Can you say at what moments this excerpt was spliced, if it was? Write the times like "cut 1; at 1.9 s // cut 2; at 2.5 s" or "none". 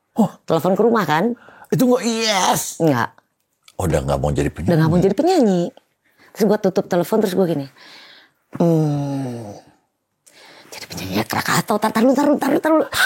none